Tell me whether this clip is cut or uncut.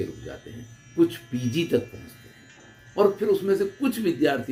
uncut